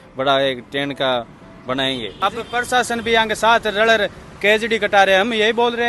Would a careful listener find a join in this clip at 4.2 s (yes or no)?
no